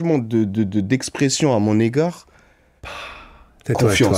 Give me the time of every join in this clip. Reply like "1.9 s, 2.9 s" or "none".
none